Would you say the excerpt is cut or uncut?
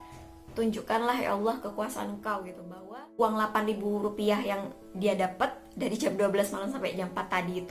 cut